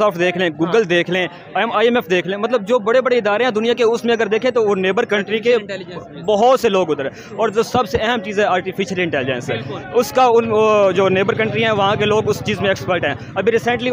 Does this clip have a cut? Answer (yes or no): no